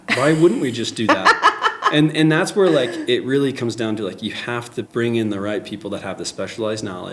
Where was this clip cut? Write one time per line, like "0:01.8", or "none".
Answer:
0:04.8